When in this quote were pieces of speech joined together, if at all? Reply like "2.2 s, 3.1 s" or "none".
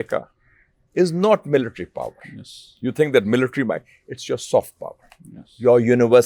none